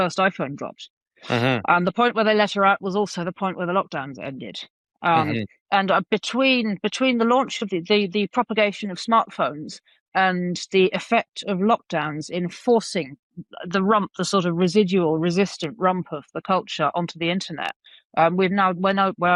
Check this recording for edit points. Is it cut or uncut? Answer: uncut